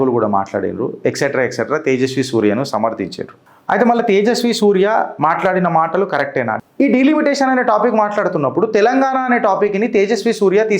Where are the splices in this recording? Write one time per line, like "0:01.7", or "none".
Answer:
0:06.5